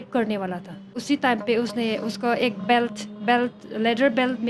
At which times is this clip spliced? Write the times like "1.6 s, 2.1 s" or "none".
1.0 s